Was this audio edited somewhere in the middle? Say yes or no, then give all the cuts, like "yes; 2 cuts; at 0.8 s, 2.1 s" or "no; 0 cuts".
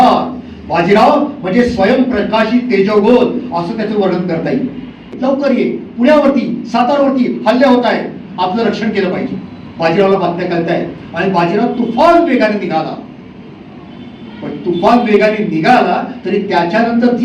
yes; 1 cut; at 5.1 s